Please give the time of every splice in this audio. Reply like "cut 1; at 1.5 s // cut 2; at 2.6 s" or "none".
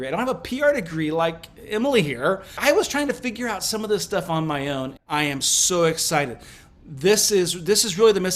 cut 1; at 2.6 s // cut 2; at 5.0 s